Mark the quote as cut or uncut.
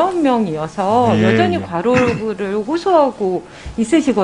uncut